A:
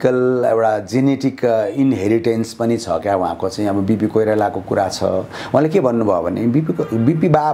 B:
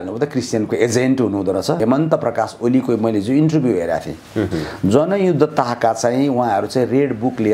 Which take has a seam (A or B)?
B